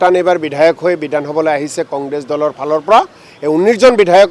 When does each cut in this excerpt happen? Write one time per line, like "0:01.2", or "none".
none